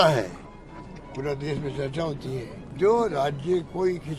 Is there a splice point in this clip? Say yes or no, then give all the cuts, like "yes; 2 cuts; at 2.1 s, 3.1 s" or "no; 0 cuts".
yes; 1 cut; at 2.6 s